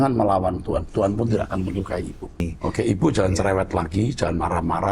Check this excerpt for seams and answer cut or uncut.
cut